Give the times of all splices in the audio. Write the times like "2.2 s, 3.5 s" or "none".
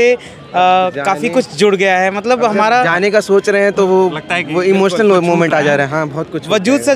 none